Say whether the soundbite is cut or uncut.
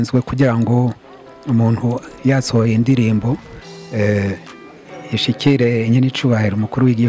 uncut